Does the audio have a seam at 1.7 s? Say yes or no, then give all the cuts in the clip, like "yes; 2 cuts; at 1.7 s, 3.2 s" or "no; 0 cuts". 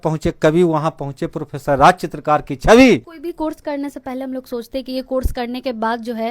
no; 1 cut; at 3.1 s